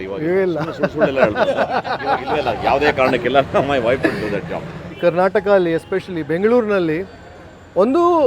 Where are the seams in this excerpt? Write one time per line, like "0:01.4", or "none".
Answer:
0:05.0